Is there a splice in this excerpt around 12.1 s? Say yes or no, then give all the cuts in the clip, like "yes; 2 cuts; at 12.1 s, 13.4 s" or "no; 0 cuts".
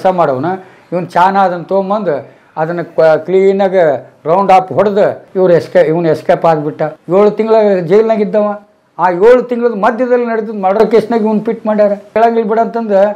yes; 3 cuts; at 5.2 s, 6.9 s, 12.1 s